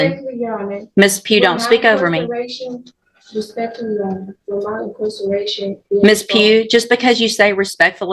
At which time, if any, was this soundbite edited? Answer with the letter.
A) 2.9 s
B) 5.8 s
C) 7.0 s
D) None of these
D